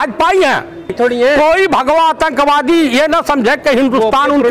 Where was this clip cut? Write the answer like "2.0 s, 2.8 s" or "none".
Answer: 0.9 s